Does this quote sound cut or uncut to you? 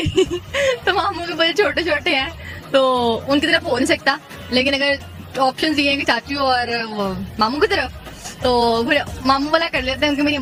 uncut